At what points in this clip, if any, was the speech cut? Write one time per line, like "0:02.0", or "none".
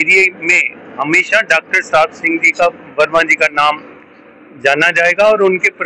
none